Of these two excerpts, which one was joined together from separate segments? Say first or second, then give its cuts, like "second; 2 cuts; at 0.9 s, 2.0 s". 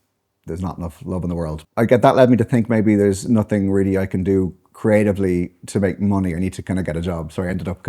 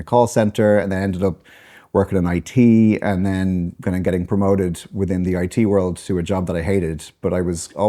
first; 1 cut; at 1.6 s